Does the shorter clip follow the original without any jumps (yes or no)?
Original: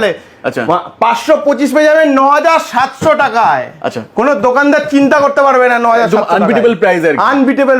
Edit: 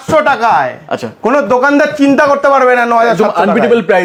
yes